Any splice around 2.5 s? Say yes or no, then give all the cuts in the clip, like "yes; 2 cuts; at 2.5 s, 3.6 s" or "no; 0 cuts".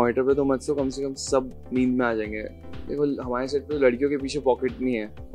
yes; 1 cut; at 2.5 s